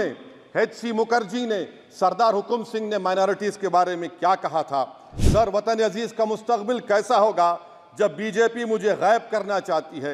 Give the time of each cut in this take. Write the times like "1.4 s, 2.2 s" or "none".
none